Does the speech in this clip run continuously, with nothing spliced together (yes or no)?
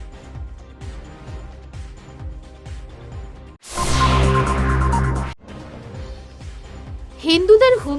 no